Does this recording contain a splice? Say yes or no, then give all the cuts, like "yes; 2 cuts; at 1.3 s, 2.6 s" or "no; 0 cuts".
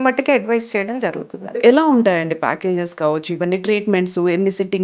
yes; 1 cut; at 1.6 s